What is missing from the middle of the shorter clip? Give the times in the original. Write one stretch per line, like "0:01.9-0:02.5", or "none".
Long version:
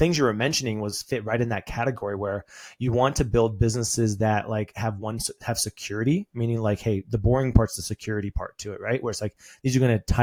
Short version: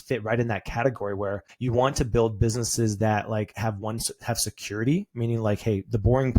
0:02.5-0:02.7